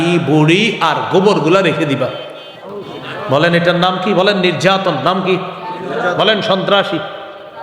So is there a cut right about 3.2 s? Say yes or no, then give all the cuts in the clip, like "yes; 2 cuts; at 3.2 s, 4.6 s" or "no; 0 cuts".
yes; 1 cut; at 3.2 s